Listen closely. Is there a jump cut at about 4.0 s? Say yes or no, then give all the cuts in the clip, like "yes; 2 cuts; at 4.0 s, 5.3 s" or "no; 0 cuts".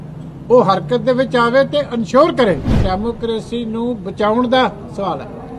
no; 1 cut; at 2.8 s